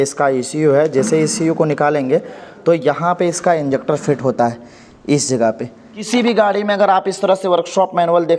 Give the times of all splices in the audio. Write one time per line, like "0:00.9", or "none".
0:06.1